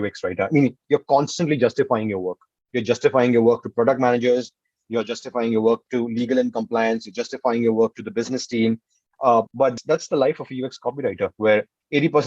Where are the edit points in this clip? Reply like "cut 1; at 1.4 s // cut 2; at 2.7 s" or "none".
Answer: cut 1; at 9.5 s